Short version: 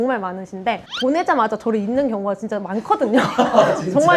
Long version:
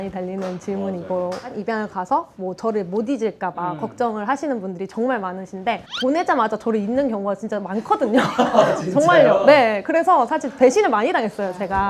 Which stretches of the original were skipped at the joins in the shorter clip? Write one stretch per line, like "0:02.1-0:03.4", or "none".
none